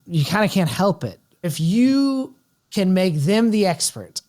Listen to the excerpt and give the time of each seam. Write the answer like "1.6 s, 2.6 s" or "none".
1.4 s